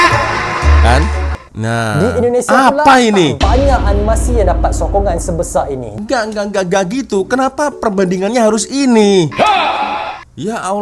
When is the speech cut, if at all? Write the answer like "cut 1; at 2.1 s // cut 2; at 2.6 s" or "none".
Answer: cut 1; at 1.3 s